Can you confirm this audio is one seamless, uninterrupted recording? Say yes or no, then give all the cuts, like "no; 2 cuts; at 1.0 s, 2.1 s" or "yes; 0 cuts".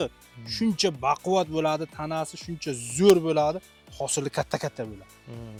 yes; 0 cuts